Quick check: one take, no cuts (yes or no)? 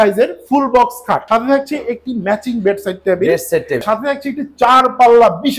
no